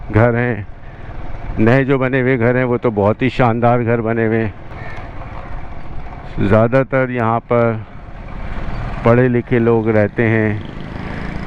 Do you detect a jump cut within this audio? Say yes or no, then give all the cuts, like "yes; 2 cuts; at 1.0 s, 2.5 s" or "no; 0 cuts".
yes; 1 cut; at 4.7 s